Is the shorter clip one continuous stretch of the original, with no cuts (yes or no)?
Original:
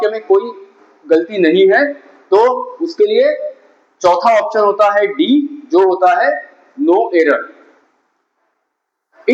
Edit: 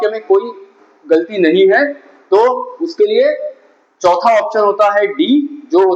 yes